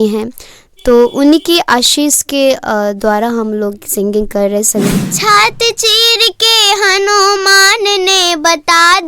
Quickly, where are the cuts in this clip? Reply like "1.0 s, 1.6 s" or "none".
4.9 s